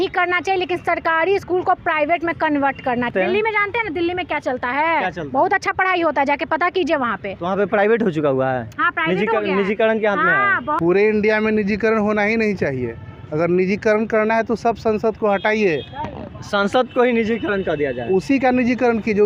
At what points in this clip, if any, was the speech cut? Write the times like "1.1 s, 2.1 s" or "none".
3.1 s, 10.8 s